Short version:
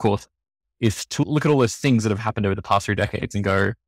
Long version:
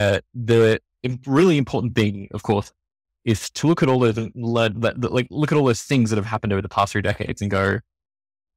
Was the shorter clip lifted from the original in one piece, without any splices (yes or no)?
no